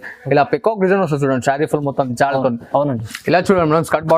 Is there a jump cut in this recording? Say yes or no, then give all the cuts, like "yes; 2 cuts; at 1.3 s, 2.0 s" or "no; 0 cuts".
yes; 1 cut; at 3.1 s